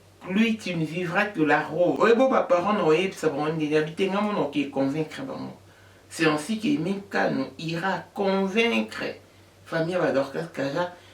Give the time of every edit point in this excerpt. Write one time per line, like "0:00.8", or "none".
0:02.0